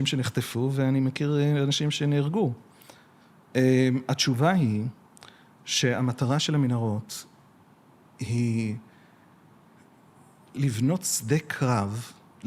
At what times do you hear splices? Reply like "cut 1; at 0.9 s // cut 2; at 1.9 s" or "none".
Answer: cut 1; at 10.5 s